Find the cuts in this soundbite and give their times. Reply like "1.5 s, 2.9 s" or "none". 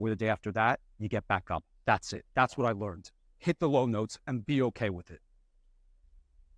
none

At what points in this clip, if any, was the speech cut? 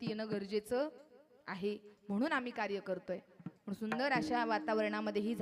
none

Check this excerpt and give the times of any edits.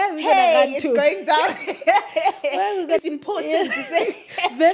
3.0 s

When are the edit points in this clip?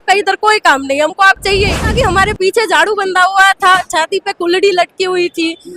1.9 s

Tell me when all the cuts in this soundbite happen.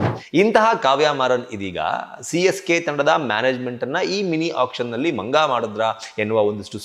none

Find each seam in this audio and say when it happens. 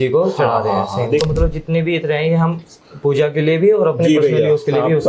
1.2 s

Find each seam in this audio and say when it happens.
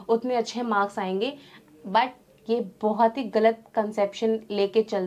none

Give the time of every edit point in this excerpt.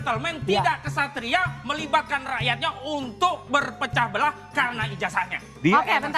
none

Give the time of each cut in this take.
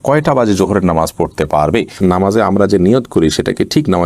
2.0 s

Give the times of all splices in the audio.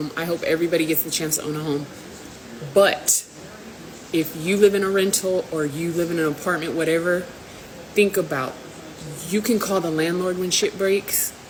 none

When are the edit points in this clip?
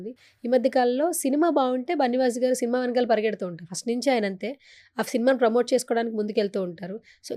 none

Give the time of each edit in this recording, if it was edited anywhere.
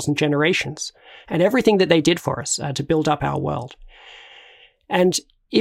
none

